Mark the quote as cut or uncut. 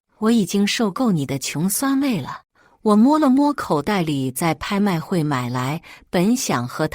cut